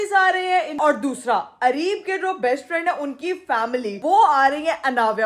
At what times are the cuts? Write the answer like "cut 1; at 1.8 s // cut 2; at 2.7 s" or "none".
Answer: cut 1; at 0.8 s // cut 2; at 4.0 s